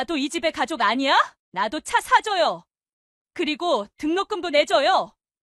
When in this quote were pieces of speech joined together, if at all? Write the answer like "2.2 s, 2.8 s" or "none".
1.4 s